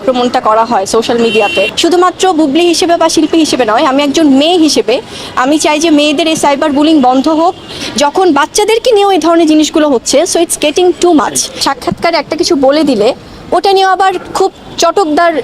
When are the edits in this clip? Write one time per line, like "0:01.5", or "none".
0:01.7
0:07.8
0:11.6